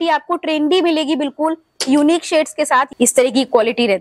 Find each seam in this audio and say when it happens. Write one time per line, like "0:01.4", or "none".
0:02.9